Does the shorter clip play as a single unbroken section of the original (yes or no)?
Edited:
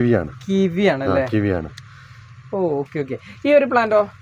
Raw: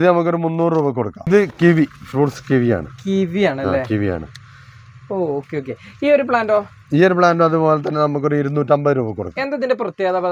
yes